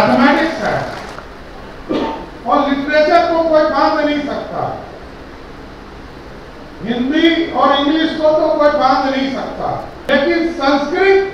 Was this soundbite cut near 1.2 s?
yes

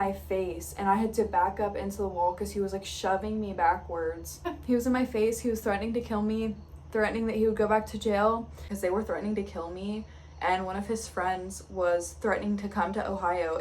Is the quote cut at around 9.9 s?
no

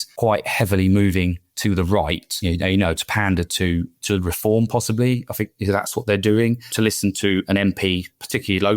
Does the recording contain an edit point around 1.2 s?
no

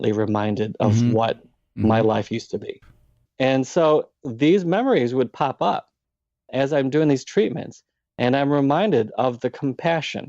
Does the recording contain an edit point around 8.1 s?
no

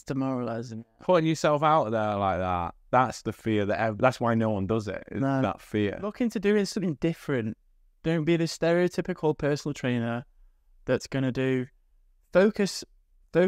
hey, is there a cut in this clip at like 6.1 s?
yes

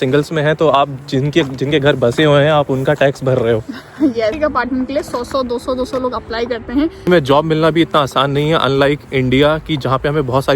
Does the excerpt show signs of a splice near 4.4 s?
yes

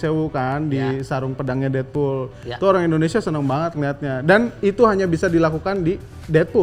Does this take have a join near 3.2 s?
no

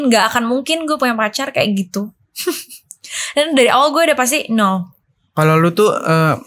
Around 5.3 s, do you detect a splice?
yes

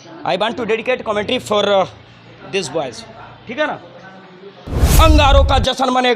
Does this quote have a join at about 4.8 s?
yes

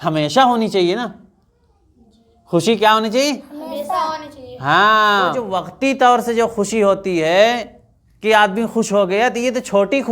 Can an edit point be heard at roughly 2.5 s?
no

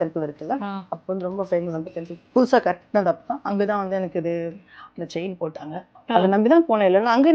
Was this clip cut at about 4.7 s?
no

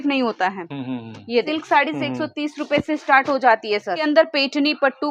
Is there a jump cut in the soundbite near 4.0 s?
yes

